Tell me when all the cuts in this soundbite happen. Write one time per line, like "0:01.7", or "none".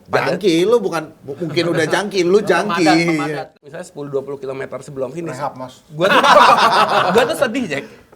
0:03.5